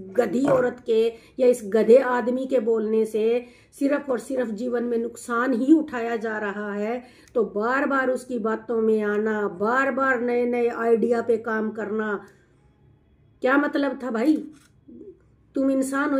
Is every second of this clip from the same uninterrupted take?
yes; 0 cuts

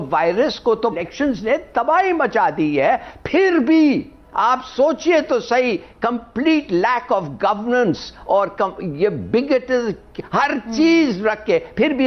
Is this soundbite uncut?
no; 1 cut; at 1.0 s

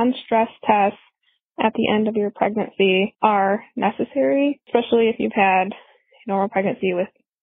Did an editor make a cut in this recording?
yes; 2 cuts; at 3.1 s, 4.6 s

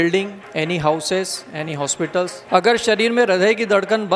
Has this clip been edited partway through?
yes; 1 cut; at 2.4 s

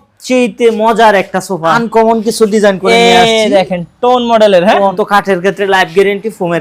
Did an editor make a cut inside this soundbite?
yes; 2 cuts; at 1.8 s, 5.0 s

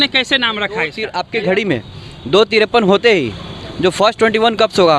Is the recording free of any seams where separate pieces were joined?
no; 1 cut; at 1.0 s

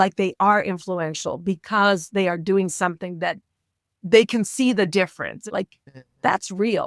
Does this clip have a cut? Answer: yes; 1 cut; at 5.4 s

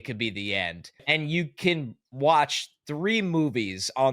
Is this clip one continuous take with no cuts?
no; 1 cut; at 1.0 s

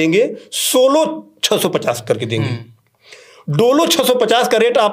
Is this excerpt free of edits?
yes; 0 cuts

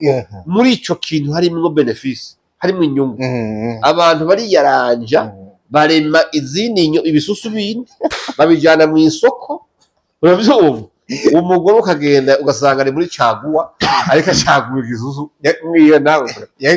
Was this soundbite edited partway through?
no; 0 cuts

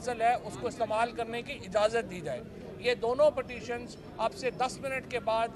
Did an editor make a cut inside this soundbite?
no; 0 cuts

